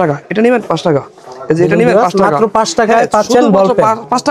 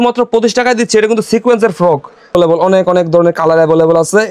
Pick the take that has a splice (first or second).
second